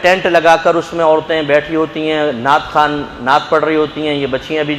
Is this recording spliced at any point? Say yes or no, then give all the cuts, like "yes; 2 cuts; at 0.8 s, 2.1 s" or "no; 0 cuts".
no; 0 cuts